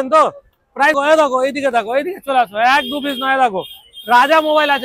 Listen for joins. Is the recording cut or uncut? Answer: cut